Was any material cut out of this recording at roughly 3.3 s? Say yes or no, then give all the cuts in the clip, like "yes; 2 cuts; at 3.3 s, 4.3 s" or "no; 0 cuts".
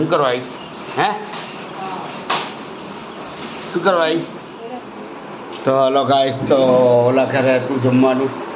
no; 1 cut; at 4.9 s